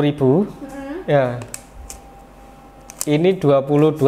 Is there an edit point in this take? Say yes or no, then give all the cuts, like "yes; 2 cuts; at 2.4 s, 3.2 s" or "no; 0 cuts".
no; 0 cuts